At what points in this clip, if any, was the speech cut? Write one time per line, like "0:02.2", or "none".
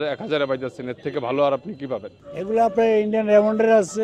0:02.2